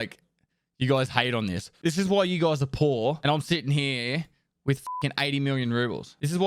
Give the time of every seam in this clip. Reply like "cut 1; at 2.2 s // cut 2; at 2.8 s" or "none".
cut 1; at 1.7 s // cut 2; at 3.2 s